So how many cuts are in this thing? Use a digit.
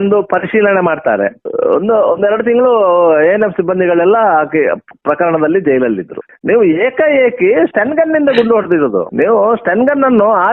2